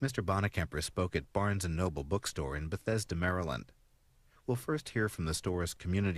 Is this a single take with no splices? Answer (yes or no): yes